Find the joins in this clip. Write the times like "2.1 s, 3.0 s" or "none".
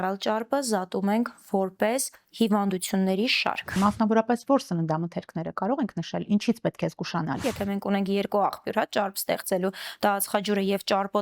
3.7 s, 7.4 s